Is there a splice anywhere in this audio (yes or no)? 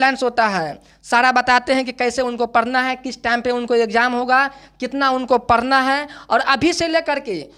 no